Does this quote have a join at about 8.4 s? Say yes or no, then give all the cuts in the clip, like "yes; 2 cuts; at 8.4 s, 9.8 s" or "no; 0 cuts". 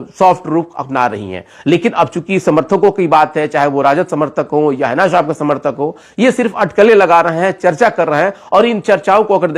no; 0 cuts